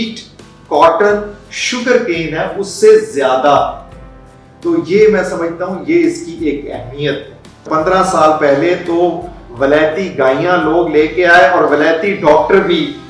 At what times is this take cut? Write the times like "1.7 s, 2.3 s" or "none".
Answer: 7.6 s